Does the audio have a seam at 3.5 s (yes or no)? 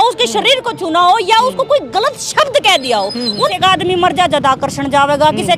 yes